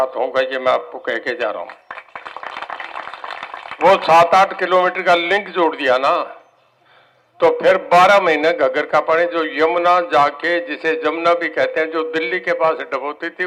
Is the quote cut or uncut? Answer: uncut